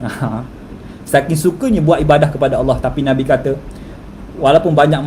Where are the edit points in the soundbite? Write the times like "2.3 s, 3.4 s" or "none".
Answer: none